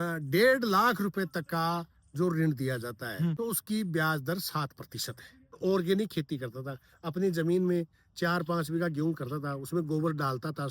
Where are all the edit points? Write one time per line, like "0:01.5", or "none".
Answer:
0:03.4
0:05.6